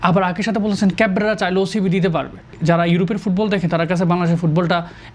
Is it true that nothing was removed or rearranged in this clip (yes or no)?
no